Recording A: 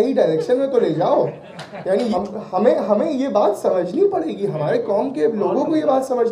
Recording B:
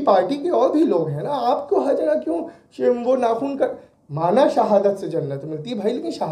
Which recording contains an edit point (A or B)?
A